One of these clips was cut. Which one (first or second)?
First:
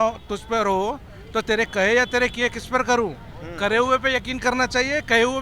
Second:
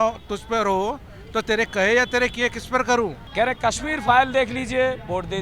second